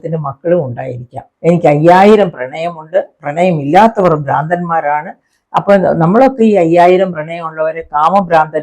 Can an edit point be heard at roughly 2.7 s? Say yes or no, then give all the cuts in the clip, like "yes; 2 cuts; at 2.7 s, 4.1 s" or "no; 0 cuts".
no; 1 cut; at 1.2 s